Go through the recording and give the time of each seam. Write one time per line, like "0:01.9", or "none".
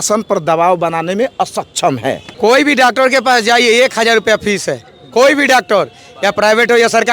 0:02.3